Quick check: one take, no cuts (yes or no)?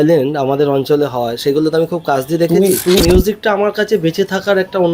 no